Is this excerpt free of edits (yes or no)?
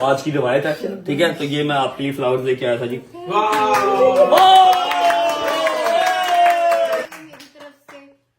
no